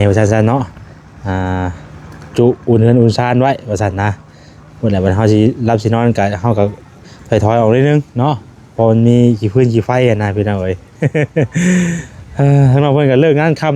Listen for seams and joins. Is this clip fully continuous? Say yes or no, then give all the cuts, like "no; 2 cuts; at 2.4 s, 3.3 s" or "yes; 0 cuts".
yes; 0 cuts